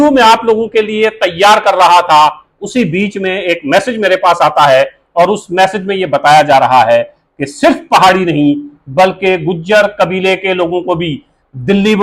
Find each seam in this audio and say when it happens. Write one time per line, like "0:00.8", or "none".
none